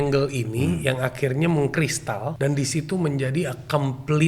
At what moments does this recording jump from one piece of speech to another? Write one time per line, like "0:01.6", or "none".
0:02.3